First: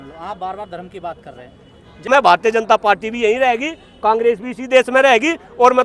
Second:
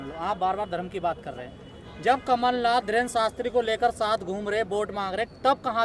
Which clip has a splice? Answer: first; 1 cut; at 2.1 s

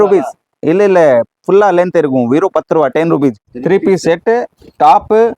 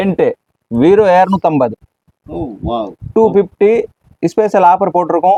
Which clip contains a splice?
first; 1 cut; at 3.5 s

